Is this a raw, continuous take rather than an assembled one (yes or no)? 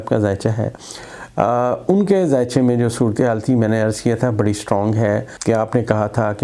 no